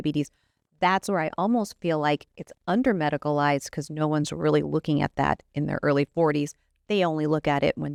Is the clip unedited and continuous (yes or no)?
yes